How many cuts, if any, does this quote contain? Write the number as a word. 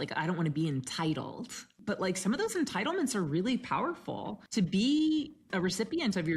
three